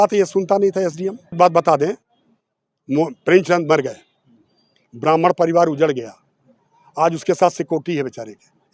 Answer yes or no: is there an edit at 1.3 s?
yes